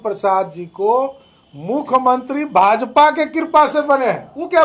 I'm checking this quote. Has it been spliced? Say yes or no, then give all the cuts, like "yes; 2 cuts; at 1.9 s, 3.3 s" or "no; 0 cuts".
no; 0 cuts